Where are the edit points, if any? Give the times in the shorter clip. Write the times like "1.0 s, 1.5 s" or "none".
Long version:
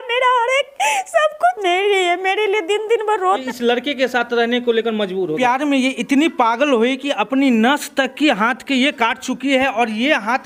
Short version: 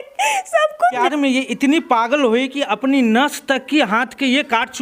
1.0 s